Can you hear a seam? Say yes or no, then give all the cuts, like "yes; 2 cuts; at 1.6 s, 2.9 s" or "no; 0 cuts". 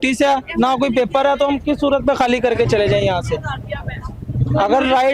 no; 0 cuts